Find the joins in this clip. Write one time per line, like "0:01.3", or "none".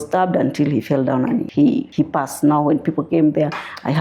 0:01.6